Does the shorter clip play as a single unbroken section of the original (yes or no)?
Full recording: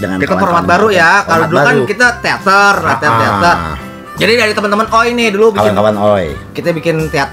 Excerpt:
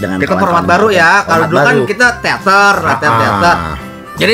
yes